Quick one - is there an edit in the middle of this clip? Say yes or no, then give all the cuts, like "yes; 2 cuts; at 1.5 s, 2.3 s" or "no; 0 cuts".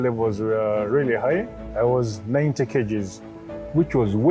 yes; 1 cut; at 1.6 s